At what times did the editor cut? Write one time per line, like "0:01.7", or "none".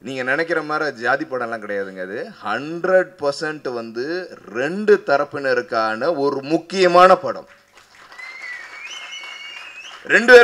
none